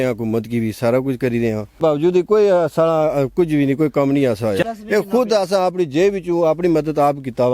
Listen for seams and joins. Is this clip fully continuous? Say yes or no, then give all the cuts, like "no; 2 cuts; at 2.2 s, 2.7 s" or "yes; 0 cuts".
no; 2 cuts; at 1.8 s, 4.6 s